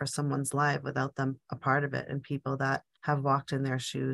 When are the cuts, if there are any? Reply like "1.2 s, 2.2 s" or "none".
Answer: none